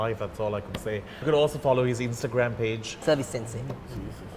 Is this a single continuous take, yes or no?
no